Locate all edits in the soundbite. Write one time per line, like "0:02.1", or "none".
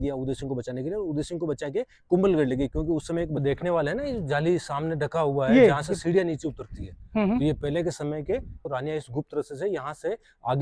0:03.4
0:08.6